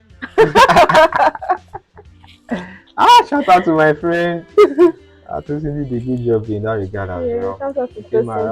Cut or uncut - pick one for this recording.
uncut